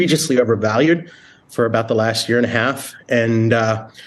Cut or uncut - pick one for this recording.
uncut